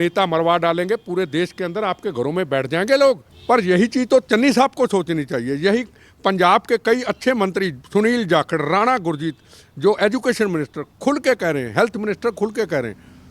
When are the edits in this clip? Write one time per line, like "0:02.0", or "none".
0:03.3